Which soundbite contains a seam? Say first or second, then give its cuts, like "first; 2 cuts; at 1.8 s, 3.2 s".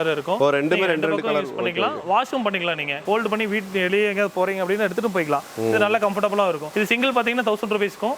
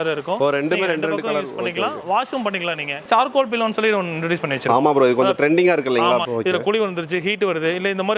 second; 2 cuts; at 3.1 s, 6.2 s